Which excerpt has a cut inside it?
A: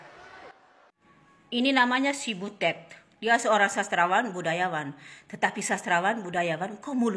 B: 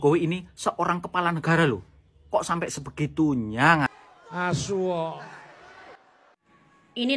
B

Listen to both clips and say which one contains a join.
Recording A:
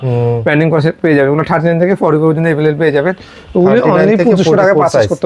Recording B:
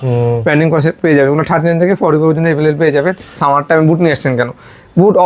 B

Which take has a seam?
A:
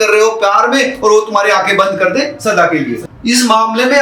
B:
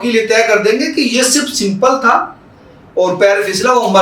A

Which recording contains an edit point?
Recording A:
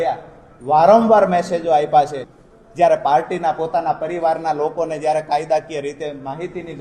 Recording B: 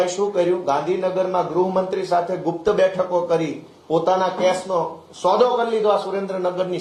A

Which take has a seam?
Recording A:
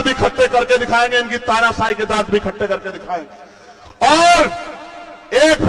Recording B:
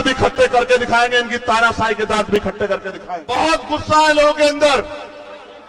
B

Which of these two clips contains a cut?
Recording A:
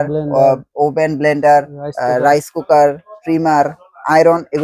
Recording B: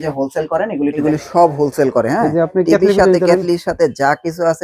B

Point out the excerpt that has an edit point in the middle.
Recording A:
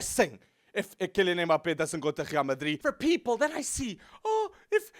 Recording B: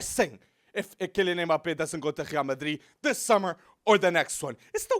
A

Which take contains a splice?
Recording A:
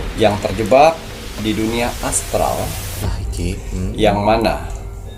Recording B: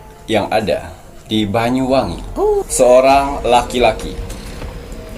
B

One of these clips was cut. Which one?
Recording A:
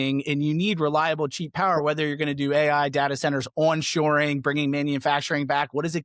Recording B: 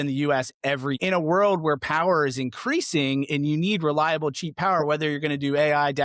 B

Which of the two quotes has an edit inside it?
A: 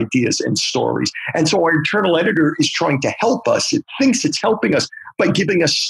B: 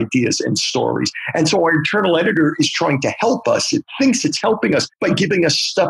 B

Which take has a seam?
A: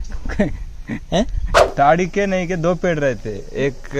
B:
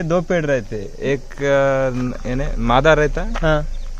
A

